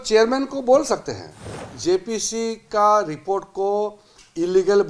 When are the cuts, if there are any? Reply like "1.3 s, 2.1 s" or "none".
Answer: 1.7 s